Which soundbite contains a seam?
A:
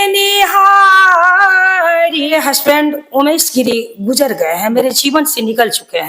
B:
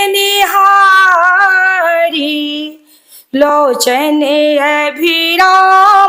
A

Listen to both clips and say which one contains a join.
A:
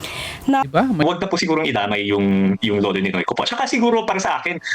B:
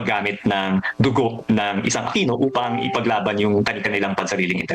A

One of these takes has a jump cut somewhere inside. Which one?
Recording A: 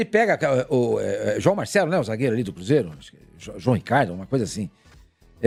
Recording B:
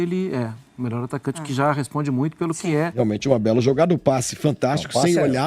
B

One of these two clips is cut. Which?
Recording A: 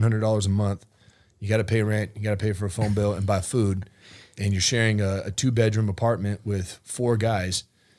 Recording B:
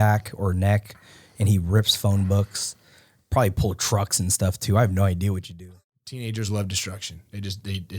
B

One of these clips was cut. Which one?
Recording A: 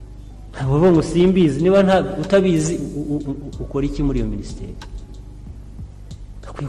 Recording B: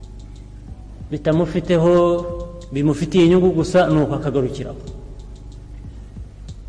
A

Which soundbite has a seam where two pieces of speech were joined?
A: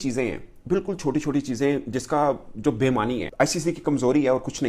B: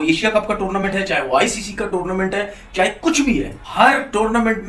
A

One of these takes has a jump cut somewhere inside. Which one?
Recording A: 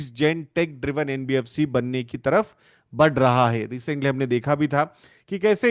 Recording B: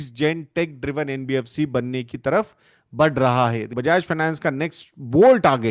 B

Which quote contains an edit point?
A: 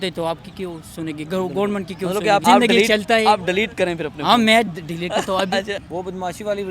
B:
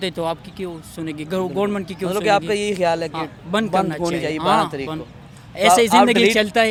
A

